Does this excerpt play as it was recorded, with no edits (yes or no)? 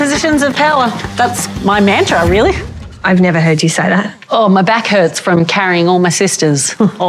yes